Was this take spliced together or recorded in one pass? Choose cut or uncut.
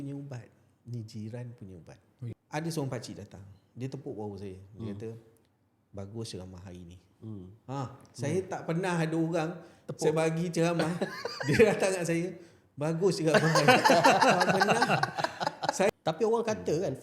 cut